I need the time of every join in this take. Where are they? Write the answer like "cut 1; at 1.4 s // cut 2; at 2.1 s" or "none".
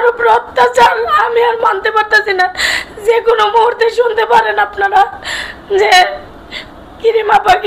none